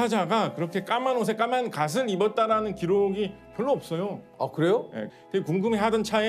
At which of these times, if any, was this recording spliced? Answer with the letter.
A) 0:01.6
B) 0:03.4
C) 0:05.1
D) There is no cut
C